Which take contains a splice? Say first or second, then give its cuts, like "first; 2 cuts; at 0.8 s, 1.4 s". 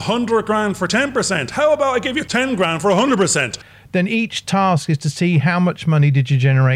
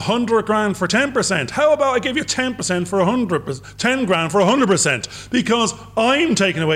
first; 2 cuts; at 2.2 s, 3.6 s